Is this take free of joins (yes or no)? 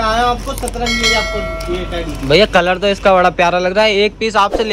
yes